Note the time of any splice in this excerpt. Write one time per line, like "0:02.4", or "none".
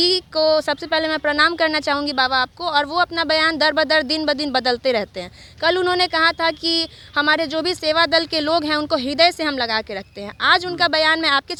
none